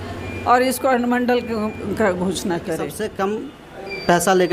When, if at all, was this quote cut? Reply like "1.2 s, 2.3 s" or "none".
2.9 s